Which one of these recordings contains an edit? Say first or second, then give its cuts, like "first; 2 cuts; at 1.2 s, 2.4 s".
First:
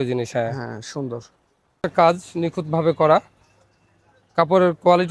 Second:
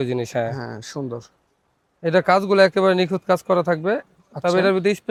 first; 1 cut; at 1.8 s